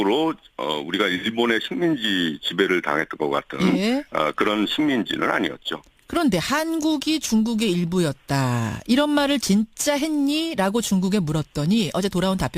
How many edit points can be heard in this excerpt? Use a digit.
1